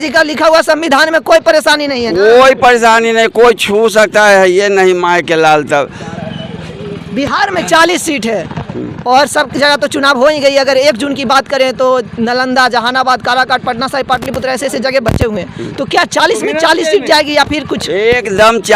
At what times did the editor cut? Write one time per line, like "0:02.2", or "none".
none